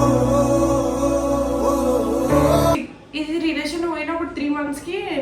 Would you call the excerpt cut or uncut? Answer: cut